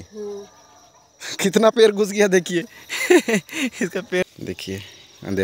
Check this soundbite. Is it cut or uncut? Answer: cut